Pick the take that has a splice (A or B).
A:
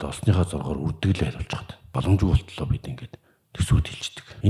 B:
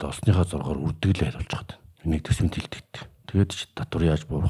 A